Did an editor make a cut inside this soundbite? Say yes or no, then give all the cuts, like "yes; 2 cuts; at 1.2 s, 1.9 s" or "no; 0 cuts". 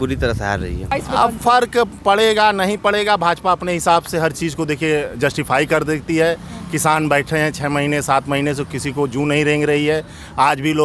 yes; 1 cut; at 0.9 s